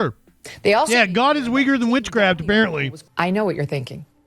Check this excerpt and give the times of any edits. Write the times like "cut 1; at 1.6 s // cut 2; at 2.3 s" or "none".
cut 1; at 3.0 s

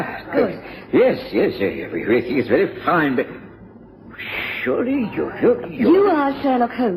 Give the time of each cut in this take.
cut 1; at 4.3 s

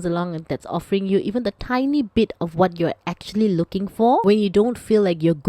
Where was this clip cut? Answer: cut 1; at 4.2 s

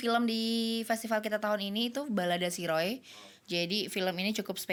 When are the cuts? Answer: none

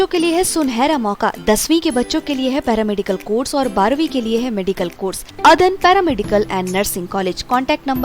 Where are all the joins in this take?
cut 1; at 5.3 s

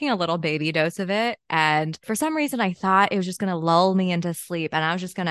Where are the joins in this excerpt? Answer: cut 1; at 2.1 s

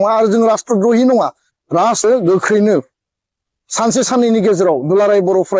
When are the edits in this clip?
cut 1; at 2.0 s

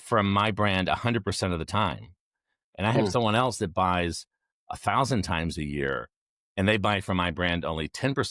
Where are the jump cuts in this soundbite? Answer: none

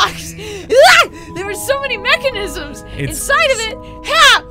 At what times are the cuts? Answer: none

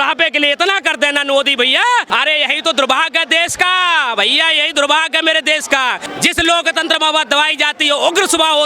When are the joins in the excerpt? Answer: cut 1; at 2.1 s // cut 2; at 6.0 s

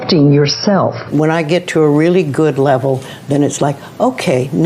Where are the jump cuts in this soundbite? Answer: cut 1; at 1.1 s

